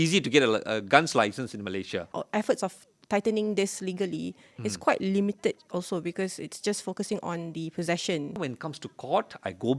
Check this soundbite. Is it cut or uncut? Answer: cut